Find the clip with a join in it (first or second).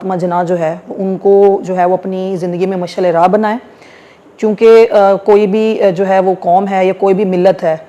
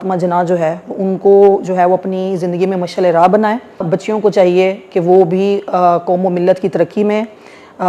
second